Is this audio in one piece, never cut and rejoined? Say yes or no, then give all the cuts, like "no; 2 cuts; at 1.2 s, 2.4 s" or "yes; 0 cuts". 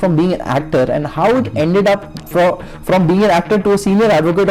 yes; 0 cuts